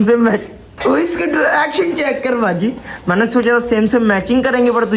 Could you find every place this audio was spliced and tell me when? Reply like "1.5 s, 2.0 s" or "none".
none